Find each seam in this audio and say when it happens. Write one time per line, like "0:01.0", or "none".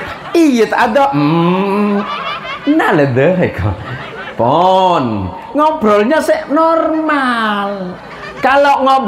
none

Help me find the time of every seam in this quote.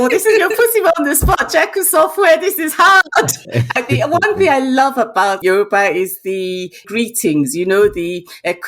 0:03.4
0:05.4
0:06.9

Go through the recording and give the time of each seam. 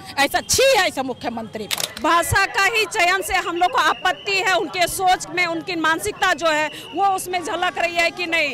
0:01.8

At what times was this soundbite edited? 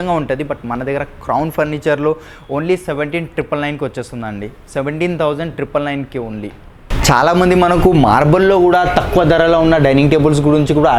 none

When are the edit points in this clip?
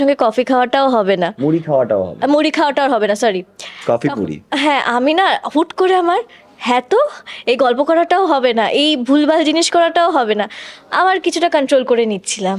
none

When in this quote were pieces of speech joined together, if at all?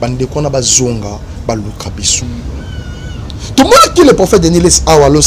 0:02.2

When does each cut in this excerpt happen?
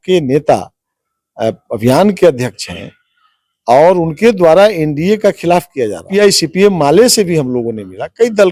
0:06.1

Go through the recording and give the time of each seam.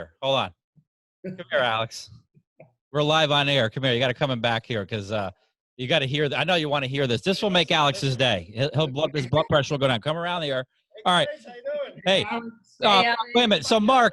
none

